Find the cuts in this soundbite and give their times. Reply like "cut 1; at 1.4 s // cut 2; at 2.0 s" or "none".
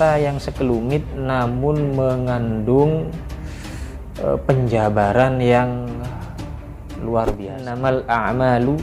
cut 1; at 7.7 s

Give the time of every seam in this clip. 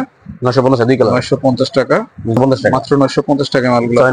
cut 1; at 2.4 s

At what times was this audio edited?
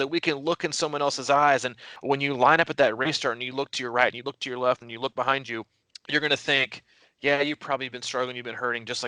cut 1; at 1.9 s

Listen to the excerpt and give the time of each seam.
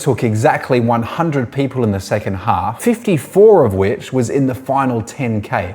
cut 1; at 2.7 s

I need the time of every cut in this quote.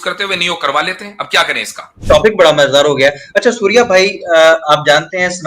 cut 1; at 1.9 s

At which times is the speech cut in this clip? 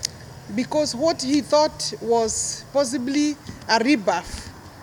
none

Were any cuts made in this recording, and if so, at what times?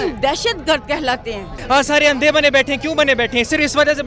cut 1; at 1.6 s

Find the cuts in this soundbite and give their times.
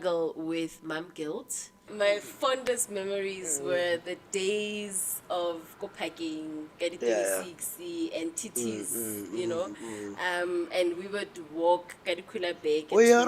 cut 1; at 1.9 s

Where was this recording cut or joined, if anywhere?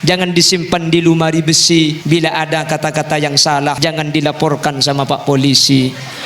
cut 1; at 2.0 s // cut 2; at 3.8 s

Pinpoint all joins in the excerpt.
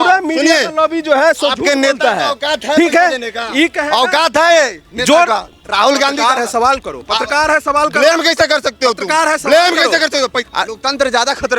cut 1; at 10.4 s

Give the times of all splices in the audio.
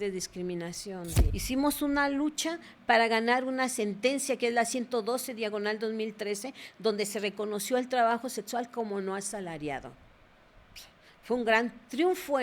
cut 1; at 1.2 s

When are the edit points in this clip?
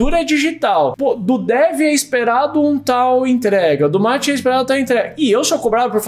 cut 1; at 1.0 s

